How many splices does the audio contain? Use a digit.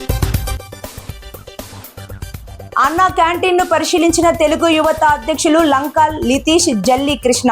1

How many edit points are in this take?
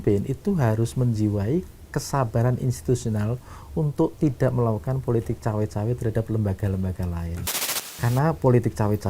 1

